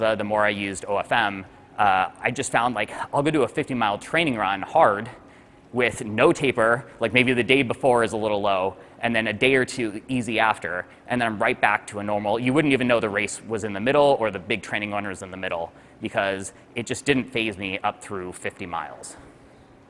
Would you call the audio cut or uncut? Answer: uncut